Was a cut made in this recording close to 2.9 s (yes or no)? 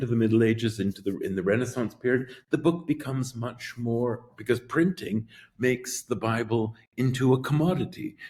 no